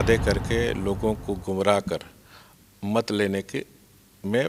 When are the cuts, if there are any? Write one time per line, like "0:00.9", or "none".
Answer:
none